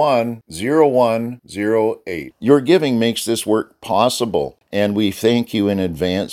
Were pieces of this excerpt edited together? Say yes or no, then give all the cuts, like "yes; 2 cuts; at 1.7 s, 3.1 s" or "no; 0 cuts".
yes; 1 cut; at 4.6 s